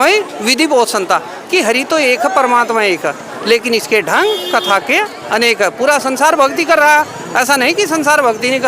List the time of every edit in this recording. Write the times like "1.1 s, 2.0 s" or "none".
none